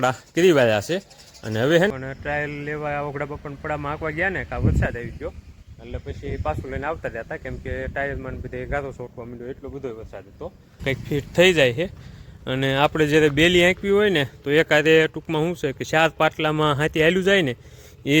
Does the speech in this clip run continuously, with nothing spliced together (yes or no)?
no